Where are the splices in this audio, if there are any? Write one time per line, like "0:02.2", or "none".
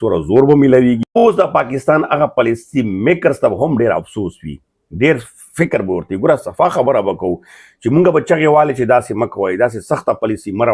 0:01.2